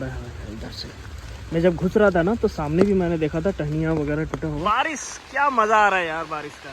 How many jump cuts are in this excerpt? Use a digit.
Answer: 1